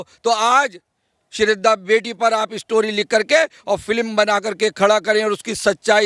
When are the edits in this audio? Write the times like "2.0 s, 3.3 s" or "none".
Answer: none